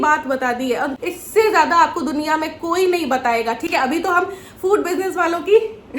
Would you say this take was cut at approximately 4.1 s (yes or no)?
no